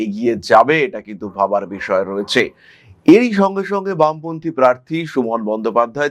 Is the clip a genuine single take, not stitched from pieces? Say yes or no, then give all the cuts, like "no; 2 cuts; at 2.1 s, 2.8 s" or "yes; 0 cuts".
yes; 0 cuts